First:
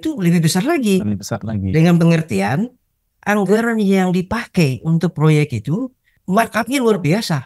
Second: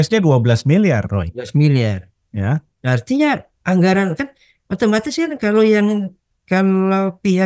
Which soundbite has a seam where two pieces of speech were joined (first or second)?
first